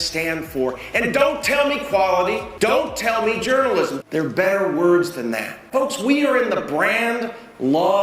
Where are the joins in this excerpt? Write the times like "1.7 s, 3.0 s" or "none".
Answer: 2.5 s, 3.9 s, 5.6 s